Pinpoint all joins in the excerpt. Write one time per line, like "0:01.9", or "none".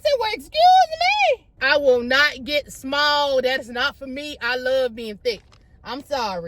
0:01.5